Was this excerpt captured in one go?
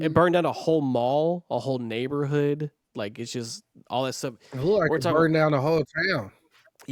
yes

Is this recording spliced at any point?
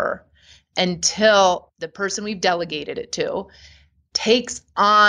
yes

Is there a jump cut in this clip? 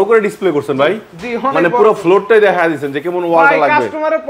no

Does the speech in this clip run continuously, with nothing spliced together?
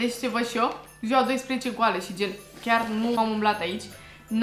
no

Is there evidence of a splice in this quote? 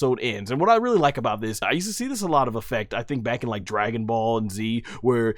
yes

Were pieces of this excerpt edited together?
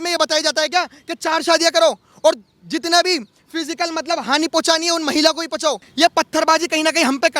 yes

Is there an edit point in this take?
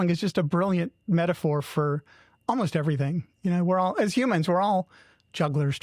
no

